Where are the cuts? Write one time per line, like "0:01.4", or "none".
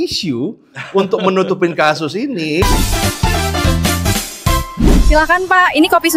0:02.6